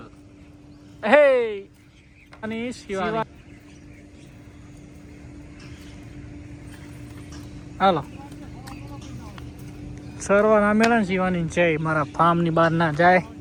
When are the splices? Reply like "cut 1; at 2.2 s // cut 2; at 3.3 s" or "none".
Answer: none